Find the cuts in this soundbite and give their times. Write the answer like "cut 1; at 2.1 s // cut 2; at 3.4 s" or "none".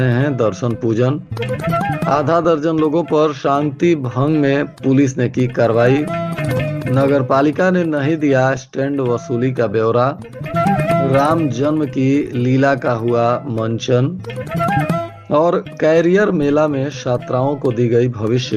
none